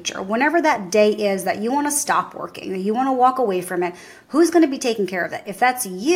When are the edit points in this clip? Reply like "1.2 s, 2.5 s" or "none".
none